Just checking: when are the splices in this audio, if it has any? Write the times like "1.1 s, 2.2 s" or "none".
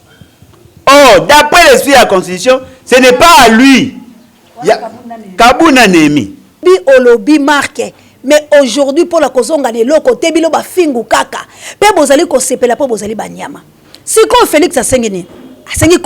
6.6 s